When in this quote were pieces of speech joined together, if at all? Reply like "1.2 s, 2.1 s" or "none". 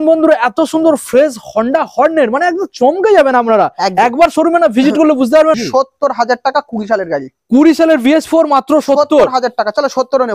5.6 s